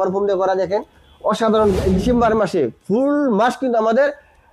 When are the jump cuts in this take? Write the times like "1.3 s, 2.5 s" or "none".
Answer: 2.0 s